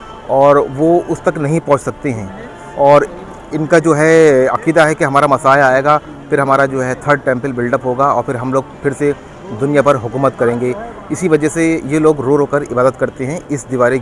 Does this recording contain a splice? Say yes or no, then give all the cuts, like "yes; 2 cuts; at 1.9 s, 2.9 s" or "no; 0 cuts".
no; 0 cuts